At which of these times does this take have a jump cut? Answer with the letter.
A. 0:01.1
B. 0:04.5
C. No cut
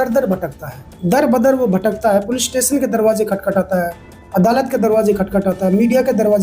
A